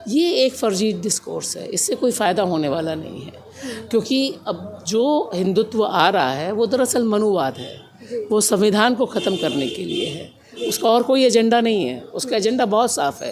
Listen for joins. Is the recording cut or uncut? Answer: uncut